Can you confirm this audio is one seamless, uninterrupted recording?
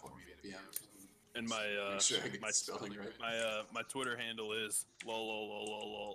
yes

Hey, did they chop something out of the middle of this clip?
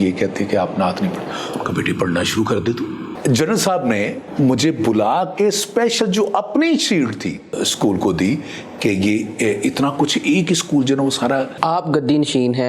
yes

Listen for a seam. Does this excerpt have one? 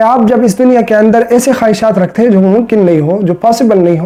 no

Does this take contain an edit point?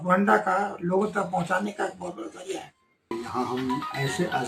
yes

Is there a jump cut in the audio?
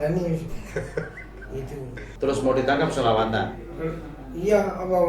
yes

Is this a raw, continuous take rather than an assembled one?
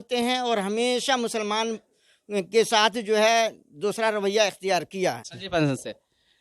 no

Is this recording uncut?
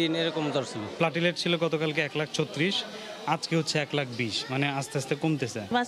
yes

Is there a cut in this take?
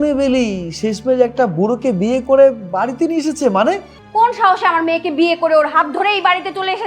yes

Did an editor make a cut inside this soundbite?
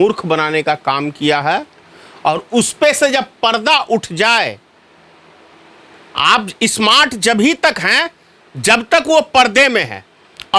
no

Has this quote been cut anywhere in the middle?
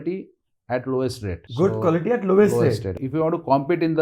no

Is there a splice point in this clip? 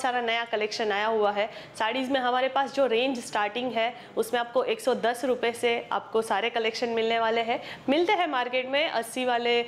no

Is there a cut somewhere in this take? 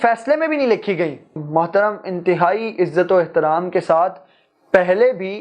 yes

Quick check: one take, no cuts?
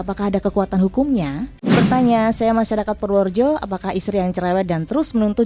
no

